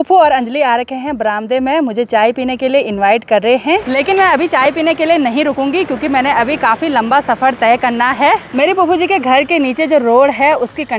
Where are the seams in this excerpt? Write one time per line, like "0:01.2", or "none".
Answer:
none

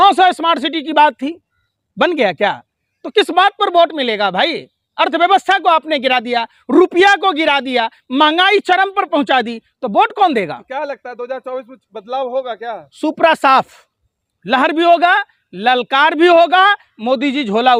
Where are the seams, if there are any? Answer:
none

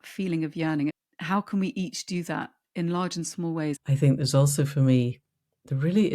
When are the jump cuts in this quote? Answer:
0:01.0
0:03.8

